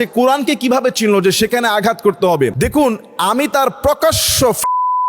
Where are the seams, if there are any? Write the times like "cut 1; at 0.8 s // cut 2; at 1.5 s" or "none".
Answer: cut 1; at 2.5 s